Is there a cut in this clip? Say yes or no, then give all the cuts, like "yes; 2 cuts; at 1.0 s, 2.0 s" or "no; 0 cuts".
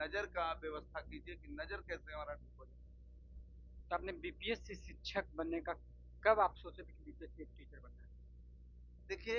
no; 0 cuts